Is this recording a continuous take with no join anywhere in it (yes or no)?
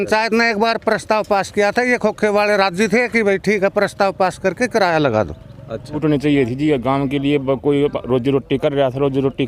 no